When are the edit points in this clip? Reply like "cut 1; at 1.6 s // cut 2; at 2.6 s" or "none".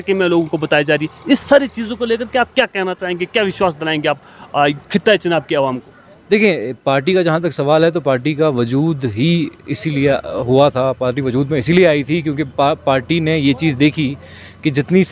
none